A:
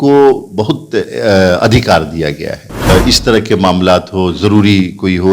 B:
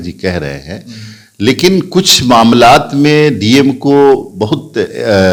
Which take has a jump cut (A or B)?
A